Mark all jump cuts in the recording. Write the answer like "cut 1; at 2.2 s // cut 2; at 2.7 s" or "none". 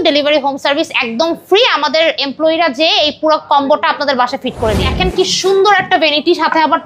cut 1; at 4.9 s